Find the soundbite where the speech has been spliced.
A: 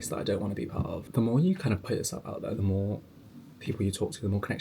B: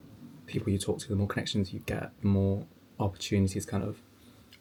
A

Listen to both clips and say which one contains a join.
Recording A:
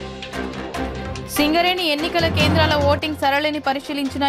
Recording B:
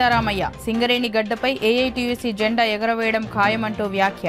A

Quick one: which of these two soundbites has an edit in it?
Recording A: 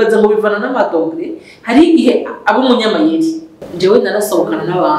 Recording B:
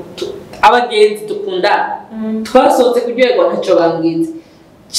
A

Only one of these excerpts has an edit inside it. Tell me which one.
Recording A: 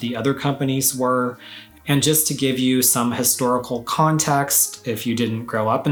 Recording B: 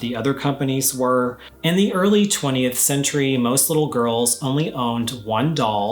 B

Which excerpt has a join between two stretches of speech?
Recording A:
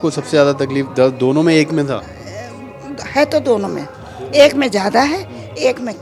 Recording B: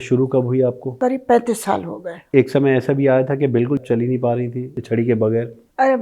B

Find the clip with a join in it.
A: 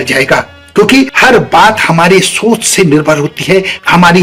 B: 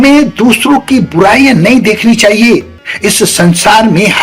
B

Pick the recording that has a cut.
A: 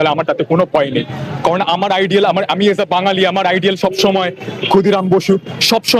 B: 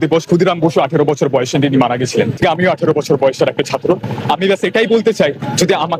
B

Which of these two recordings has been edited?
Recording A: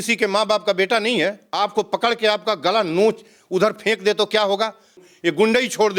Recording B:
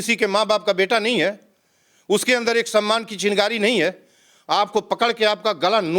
A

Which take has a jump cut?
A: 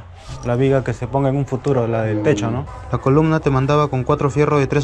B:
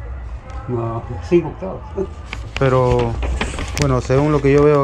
A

